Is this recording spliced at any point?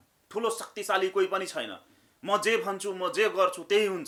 no; 0 cuts

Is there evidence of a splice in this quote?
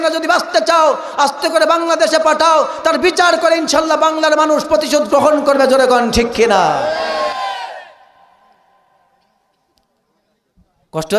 no; 0 cuts

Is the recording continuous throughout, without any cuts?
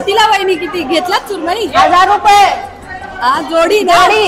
yes; 0 cuts

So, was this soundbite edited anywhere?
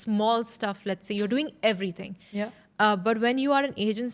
no; 0 cuts

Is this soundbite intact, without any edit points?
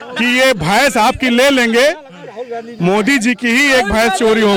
yes; 0 cuts

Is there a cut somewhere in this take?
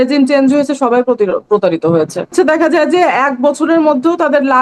yes; 1 cut; at 2.3 s

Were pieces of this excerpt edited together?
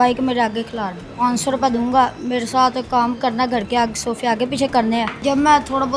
yes; 2 cuts; at 1.1 s, 5.2 s

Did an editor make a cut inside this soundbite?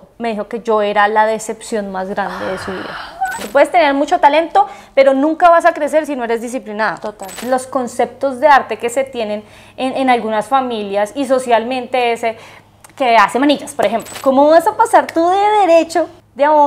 yes; 3 cuts; at 3.4 s, 7.4 s, 14.1 s

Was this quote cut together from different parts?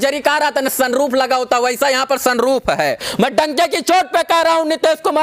yes; 1 cut; at 3.1 s

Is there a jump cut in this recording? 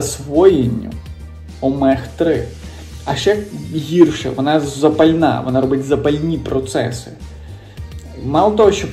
no; 0 cuts

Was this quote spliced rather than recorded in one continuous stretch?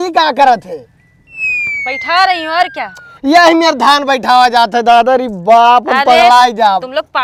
no; 0 cuts

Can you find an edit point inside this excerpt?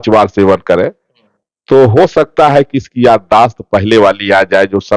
no; 0 cuts

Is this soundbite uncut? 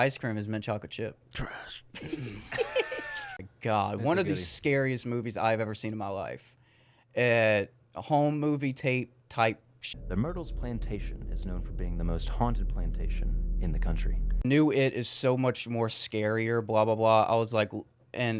no; 3 cuts; at 3.5 s, 9.8 s, 14.4 s

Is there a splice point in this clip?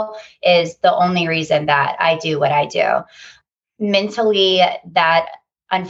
no; 0 cuts

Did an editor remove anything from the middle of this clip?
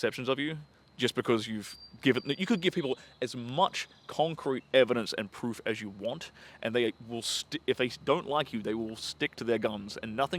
no; 0 cuts

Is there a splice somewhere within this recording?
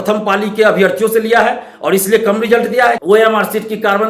yes; 1 cut; at 3.0 s

